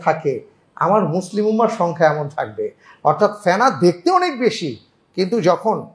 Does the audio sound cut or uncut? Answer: uncut